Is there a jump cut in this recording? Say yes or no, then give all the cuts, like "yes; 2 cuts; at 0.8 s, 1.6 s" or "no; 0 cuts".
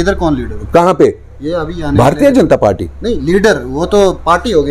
no; 0 cuts